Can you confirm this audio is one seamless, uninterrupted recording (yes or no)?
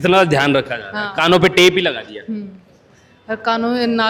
yes